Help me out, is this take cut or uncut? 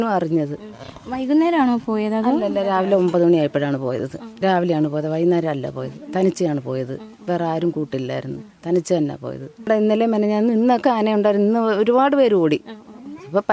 cut